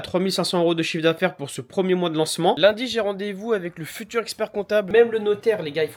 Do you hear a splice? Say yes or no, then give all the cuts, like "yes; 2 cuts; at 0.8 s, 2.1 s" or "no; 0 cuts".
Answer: yes; 2 cuts; at 2.6 s, 4.9 s